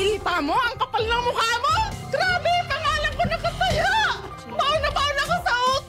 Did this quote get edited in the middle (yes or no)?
yes